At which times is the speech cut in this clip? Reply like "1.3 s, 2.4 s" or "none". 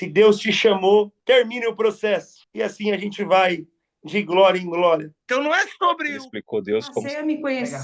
1.1 s, 2.4 s, 5.2 s